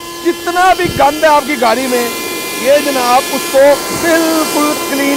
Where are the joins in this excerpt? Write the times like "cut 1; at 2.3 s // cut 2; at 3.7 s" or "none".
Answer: none